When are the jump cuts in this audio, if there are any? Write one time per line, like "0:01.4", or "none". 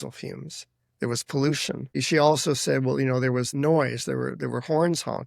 0:02.0
0:03.5

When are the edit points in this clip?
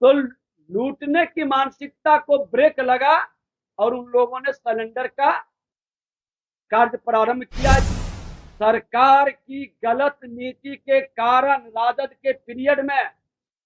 0:08.0

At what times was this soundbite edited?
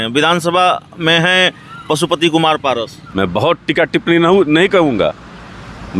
0:03.0

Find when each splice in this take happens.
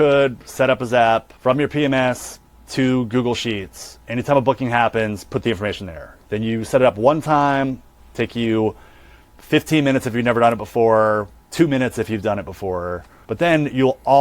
0:01.3
0:09.3
0:13.1

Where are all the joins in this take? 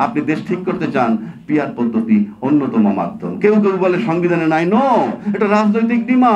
none

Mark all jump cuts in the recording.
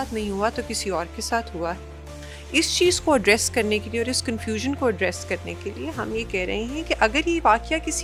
none

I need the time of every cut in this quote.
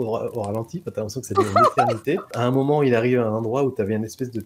0:02.3

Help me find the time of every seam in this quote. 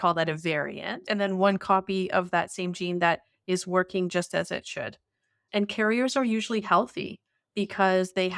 0:00.9

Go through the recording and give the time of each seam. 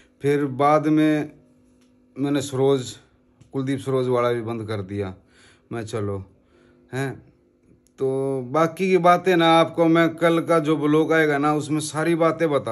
none

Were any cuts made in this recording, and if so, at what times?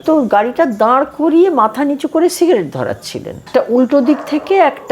0:03.4

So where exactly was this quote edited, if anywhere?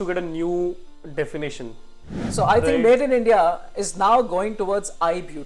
0:02.3

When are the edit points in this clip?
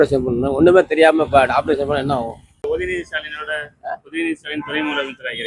0:02.6

